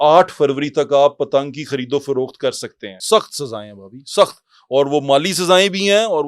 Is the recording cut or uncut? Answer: cut